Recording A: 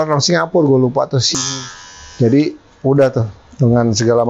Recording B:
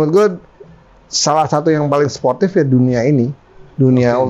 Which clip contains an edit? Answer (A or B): A